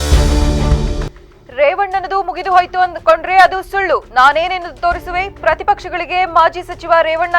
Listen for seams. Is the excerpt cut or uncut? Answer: cut